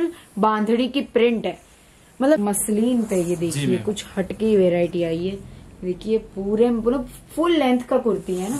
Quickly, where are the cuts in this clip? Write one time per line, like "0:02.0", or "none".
0:02.4